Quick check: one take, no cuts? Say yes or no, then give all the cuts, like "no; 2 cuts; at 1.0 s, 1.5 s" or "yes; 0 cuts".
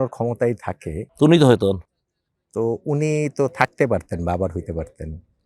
yes; 0 cuts